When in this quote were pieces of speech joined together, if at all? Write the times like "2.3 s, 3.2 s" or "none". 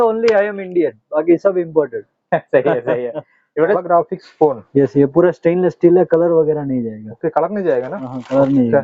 3.8 s

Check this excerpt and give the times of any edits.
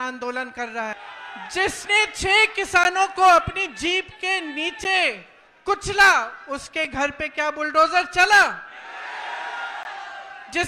1.0 s

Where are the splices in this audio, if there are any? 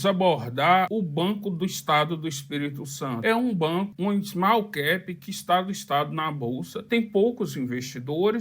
3.9 s, 6.7 s

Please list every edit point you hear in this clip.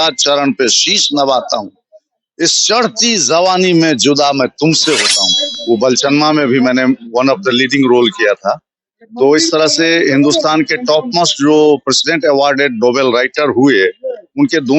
5.3 s

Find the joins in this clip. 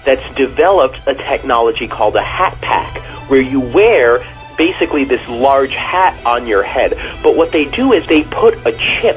4.3 s, 8.0 s

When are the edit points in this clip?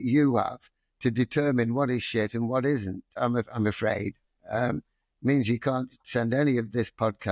3.1 s

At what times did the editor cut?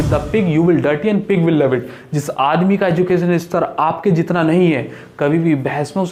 none

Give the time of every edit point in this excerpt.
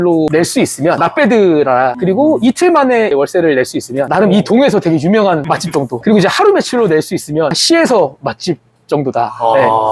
none

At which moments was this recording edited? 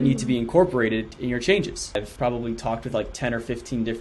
2.0 s

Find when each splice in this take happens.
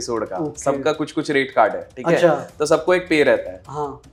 none

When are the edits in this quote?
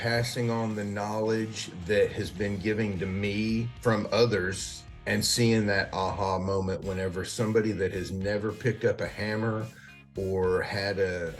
3.7 s

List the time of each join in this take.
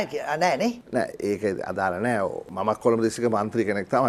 none

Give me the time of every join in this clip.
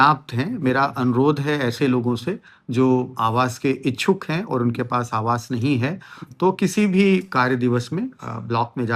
none

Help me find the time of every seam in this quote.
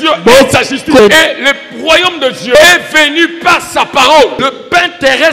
1.0 s, 2.6 s, 4.5 s

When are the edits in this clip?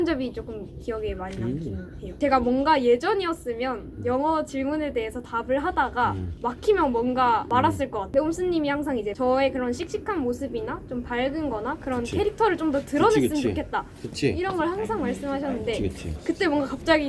2.0 s, 6.3 s, 7.6 s, 9.1 s

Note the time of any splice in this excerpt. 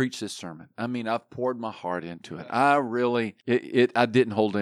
3.4 s

